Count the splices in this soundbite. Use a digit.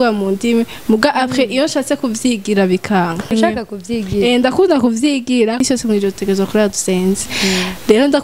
2